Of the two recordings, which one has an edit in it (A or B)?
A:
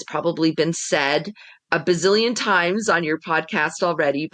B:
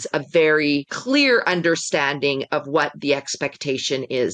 B